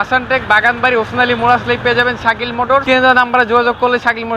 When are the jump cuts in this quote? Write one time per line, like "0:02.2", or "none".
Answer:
0:02.8